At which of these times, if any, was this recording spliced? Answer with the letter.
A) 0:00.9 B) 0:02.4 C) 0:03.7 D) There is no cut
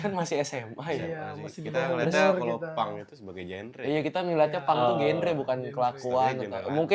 D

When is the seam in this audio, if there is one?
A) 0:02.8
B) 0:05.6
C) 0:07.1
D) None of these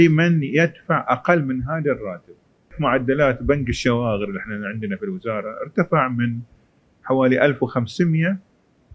A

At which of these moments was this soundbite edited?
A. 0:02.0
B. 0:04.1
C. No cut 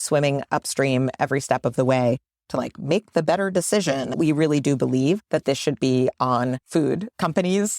B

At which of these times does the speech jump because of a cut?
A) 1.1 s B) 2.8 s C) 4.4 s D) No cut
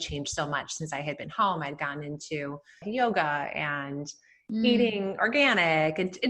B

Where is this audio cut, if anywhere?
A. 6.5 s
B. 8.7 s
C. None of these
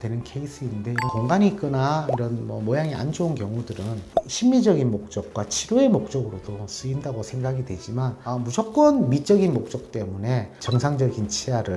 C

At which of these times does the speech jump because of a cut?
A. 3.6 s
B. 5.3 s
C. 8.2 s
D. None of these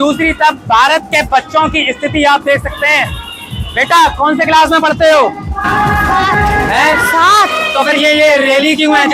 D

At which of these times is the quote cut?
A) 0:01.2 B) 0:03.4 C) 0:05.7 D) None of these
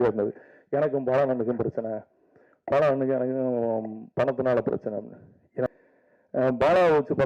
C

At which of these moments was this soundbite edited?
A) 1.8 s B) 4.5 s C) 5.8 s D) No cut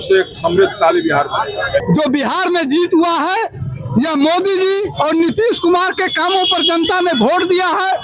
A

